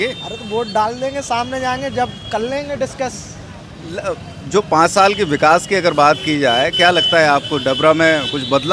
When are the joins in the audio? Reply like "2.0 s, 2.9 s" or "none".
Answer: none